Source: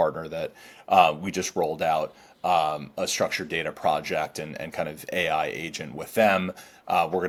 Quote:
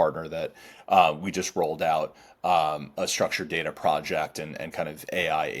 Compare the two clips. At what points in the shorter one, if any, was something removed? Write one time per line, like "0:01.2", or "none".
none